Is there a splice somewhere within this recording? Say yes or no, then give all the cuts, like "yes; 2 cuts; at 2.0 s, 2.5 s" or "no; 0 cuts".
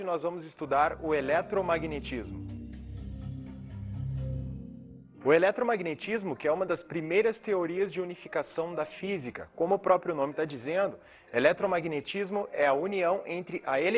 yes; 1 cut; at 4.0 s